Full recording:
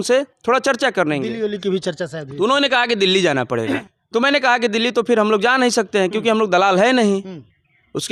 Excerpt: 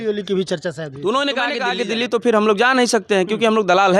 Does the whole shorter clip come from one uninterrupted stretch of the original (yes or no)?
no